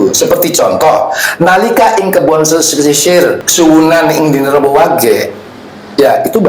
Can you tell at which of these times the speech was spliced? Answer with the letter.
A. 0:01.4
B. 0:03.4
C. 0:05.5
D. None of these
B